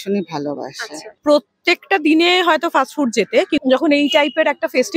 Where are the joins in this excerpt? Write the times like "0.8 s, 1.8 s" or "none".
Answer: 1.1 s, 3.6 s